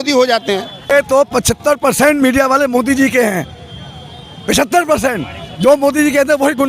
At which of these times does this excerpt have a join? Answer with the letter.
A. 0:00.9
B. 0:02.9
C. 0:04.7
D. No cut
A